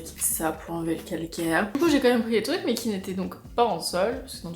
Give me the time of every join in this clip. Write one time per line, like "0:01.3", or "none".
0:01.7